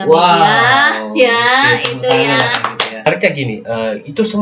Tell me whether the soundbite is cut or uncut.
cut